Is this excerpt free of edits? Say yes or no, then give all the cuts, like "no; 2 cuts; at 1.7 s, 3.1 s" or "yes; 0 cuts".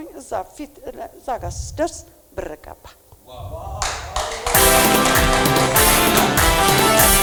yes; 0 cuts